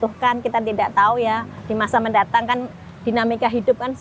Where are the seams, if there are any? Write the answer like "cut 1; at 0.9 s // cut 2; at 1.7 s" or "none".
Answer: cut 1; at 1.6 s